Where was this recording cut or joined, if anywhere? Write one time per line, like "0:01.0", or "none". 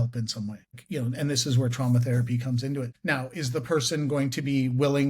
0:00.8
0:02.9